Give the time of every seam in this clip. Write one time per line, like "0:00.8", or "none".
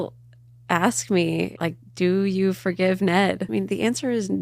0:01.5
0:03.4